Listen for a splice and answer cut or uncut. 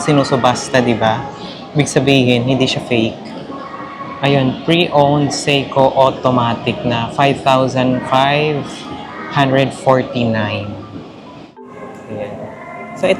cut